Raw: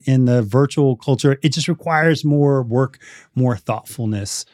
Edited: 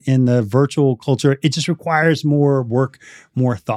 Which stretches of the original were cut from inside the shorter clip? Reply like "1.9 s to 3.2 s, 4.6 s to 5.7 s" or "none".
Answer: none